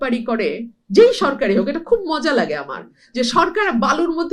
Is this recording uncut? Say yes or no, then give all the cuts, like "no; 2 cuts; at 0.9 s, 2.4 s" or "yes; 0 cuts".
yes; 0 cuts